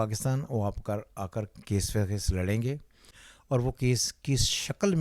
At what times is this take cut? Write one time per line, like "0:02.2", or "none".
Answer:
none